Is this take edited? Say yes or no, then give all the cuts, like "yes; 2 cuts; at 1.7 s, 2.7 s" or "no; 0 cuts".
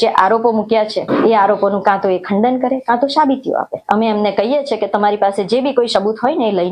yes; 2 cuts; at 1.1 s, 3.7 s